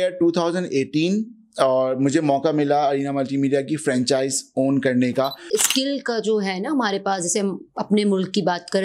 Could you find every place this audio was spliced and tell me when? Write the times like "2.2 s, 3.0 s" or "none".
5.5 s